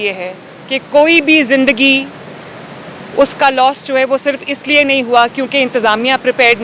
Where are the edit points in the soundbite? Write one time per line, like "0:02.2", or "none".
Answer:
none